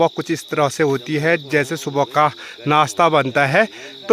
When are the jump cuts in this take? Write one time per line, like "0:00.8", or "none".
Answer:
none